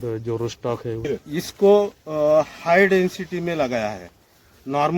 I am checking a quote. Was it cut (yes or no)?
yes